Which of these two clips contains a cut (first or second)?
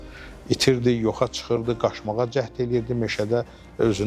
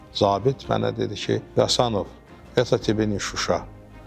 second